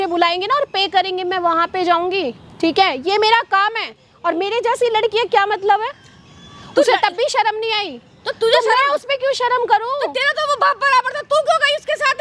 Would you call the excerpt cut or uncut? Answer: uncut